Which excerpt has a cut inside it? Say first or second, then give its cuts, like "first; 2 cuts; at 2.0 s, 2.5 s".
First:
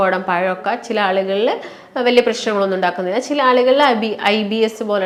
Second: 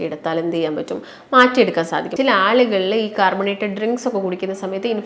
second; 1 cut; at 2.1 s